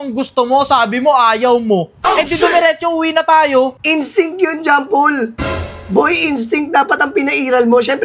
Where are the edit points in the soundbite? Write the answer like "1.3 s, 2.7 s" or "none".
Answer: 3.8 s